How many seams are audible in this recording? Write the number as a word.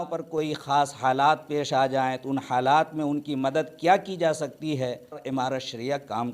one